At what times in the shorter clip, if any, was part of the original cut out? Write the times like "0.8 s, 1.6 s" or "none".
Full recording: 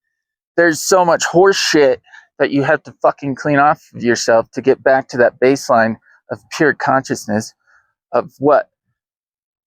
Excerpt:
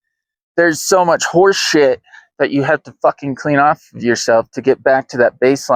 none